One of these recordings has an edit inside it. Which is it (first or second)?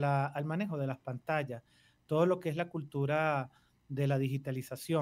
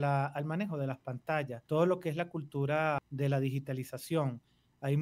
second